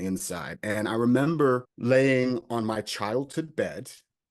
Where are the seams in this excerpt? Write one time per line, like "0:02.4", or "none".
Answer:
0:01.7